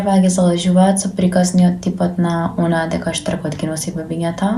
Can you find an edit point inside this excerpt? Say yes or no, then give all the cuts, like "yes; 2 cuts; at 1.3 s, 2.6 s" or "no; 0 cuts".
no; 0 cuts